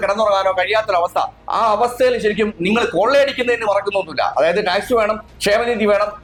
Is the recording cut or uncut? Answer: uncut